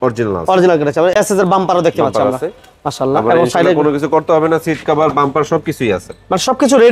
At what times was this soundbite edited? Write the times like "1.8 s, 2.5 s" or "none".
none